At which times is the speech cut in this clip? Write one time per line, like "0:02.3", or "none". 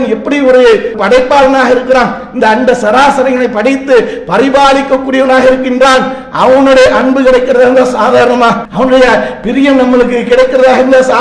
0:01.0
0:08.7

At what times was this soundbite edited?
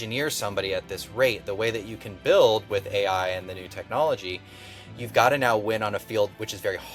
none

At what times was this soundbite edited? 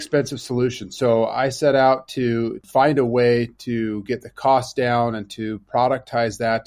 0:02.6

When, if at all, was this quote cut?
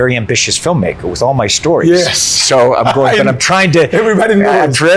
none

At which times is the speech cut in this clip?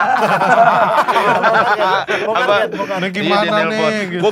none

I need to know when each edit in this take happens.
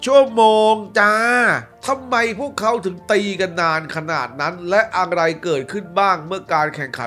0:01.7

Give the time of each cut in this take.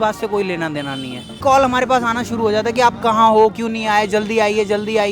0:01.4

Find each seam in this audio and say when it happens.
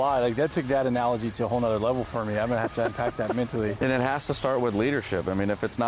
0:03.7

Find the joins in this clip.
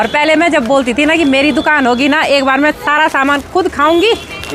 none

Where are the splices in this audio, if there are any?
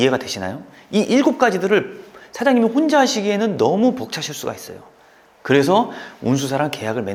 none

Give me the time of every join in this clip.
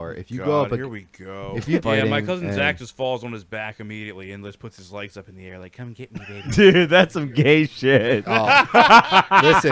0:01.8
0:06.5

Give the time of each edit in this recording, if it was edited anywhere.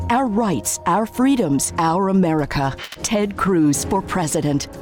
0:02.8

